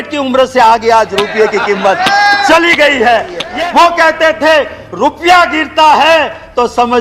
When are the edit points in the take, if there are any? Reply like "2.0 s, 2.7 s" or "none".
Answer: 3.4 s